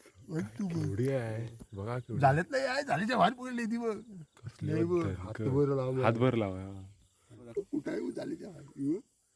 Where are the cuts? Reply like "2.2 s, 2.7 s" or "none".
7.4 s